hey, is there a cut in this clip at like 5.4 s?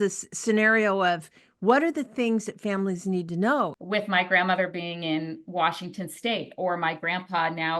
no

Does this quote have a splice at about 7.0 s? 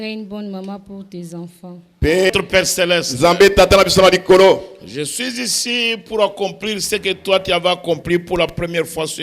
no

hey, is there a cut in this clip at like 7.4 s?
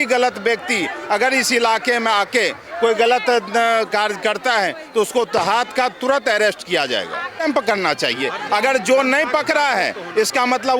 yes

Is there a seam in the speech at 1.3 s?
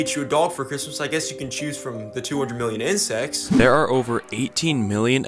no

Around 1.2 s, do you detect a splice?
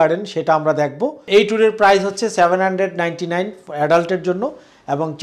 yes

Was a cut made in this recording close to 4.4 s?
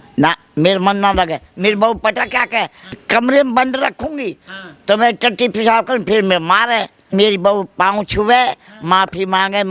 no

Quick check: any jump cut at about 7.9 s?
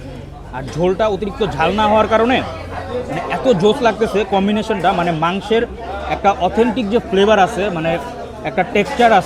no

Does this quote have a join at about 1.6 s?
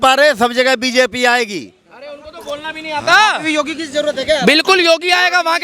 no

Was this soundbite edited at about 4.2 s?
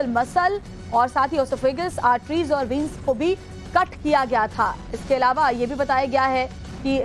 no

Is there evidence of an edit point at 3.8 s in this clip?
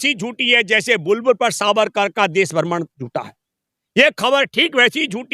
no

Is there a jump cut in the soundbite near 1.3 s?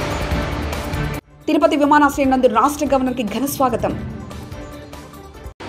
yes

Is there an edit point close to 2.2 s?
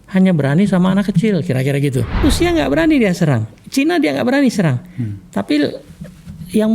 yes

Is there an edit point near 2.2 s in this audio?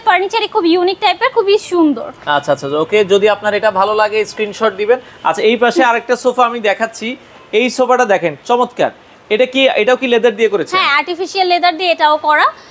no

